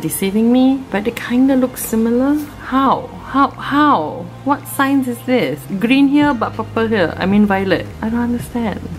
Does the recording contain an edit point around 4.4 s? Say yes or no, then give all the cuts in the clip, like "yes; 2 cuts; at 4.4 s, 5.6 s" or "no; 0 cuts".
no; 2 cuts; at 2.5 s, 5.6 s